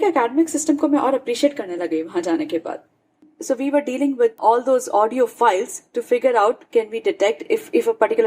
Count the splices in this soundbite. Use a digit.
1